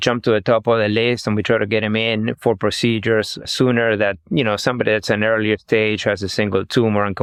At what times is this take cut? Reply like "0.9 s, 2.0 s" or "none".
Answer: none